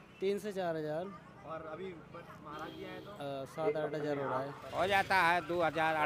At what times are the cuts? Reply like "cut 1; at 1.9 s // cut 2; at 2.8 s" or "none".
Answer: cut 1; at 4.6 s